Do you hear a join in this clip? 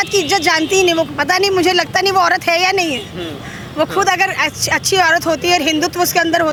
no; 0 cuts

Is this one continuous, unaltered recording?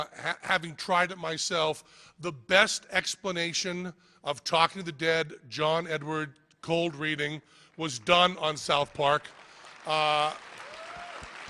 no; 1 cut; at 1.3 s

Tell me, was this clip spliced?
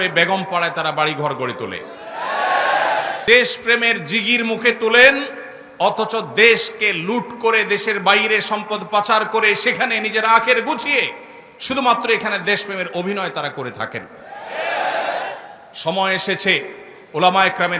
yes; 1 cut; at 3.2 s

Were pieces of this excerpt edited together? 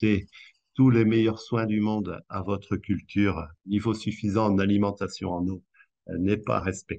yes; 1 cut; at 3.5 s

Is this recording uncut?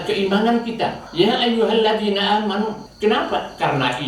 no; 2 cuts; at 1.0 s, 2.9 s

